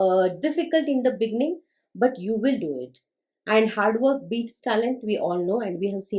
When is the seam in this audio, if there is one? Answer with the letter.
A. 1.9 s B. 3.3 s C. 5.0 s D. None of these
D